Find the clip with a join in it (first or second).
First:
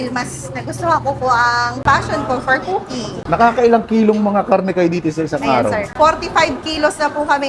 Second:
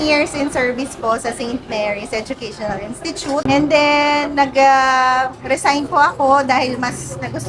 first